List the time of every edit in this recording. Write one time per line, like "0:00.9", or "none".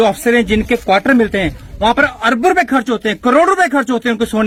none